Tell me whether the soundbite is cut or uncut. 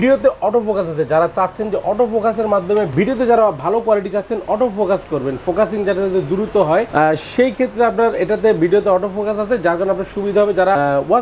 uncut